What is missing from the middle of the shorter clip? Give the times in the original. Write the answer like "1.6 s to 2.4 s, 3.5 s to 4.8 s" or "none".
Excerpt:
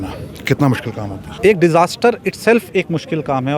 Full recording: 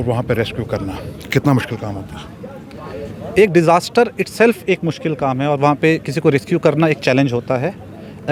2.1 s to 3.2 s